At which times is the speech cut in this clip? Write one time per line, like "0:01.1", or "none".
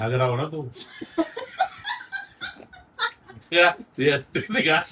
none